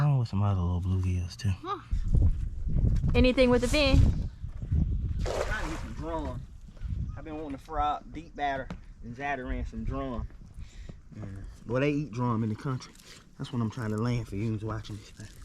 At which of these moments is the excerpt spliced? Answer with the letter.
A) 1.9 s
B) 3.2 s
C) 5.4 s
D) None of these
A